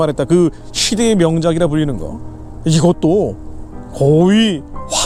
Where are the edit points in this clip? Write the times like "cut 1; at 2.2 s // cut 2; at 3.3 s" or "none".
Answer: none